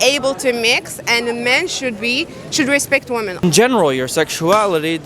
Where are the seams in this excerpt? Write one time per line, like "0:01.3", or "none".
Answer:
0:03.4